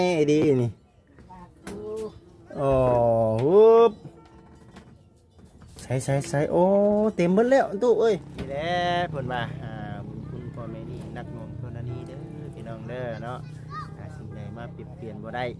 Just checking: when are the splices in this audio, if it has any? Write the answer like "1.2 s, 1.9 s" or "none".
8.3 s